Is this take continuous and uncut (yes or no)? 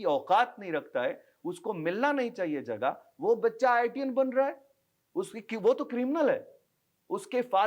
yes